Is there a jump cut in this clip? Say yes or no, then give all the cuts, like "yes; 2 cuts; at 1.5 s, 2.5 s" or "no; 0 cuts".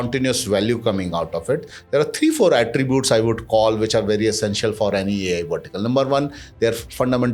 no; 0 cuts